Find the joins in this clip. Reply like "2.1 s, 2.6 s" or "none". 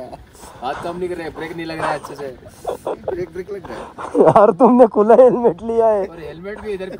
none